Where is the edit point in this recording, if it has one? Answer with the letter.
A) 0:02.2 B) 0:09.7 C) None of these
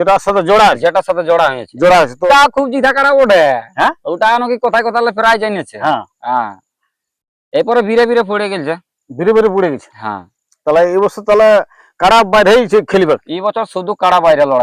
A